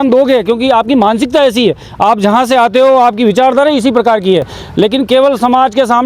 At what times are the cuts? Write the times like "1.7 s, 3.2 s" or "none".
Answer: none